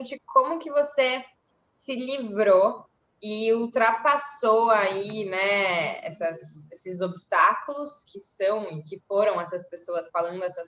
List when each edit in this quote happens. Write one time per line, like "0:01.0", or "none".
none